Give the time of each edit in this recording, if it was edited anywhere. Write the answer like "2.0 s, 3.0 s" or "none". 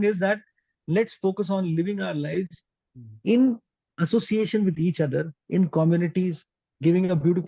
none